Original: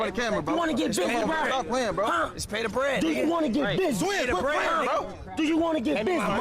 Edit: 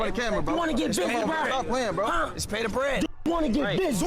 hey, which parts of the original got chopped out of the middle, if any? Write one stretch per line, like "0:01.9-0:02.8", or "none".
none